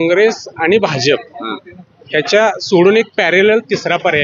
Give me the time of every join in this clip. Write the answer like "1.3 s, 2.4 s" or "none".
none

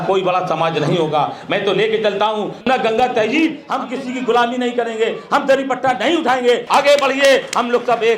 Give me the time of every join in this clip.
2.5 s, 3.7 s, 6.6 s

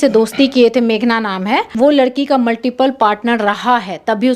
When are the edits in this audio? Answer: 1.7 s

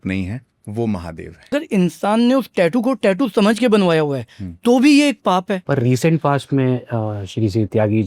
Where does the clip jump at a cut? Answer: 1.5 s, 5.6 s

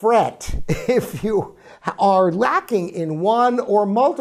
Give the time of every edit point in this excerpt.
none

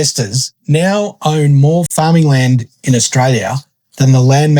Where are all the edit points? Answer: 1.9 s

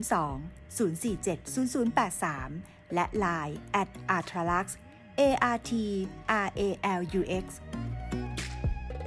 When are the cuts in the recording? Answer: 7.6 s

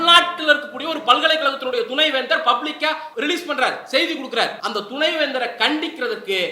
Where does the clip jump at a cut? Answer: 3.1 s, 4.6 s

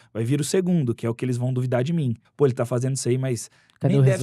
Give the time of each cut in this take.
2.2 s

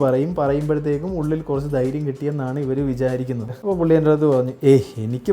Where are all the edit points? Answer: 3.5 s

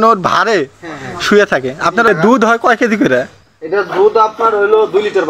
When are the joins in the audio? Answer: 2.1 s

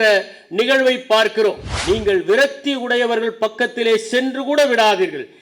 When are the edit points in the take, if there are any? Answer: 1.7 s

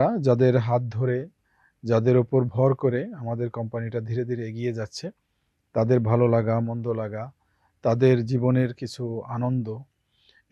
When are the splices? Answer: none

